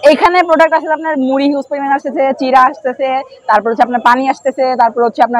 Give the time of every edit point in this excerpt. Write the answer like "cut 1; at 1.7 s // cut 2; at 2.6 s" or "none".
none